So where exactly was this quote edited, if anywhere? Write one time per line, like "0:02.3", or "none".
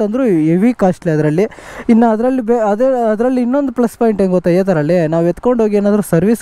none